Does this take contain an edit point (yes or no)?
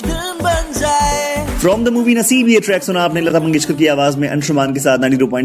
yes